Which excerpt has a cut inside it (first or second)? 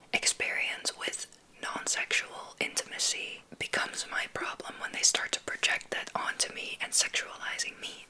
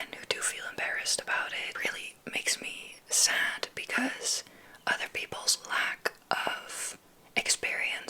second